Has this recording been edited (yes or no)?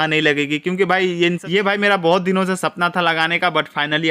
yes